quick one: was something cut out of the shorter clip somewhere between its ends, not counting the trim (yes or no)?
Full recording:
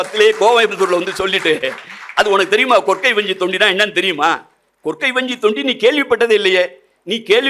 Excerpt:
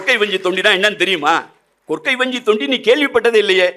no